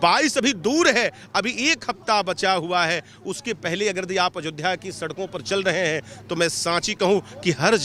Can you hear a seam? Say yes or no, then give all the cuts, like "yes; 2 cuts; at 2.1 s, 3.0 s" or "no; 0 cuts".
no; 0 cuts